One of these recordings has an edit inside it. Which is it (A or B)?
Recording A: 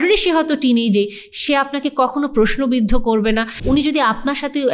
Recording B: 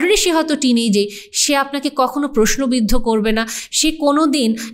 A